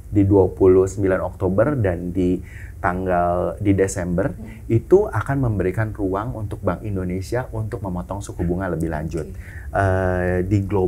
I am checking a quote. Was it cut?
yes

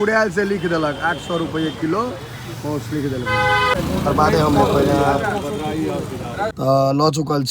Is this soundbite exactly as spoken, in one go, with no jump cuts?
no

